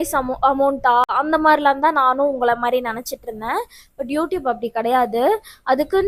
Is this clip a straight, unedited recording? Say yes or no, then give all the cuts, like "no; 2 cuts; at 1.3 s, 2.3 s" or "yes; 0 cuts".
yes; 0 cuts